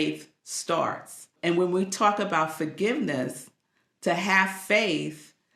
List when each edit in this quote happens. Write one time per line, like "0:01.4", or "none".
0:01.3